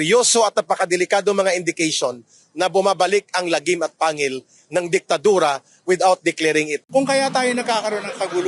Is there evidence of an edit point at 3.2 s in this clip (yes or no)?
no